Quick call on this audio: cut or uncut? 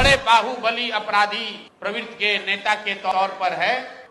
uncut